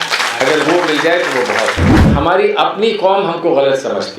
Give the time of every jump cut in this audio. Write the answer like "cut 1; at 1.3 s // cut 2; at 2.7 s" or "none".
cut 1; at 2.0 s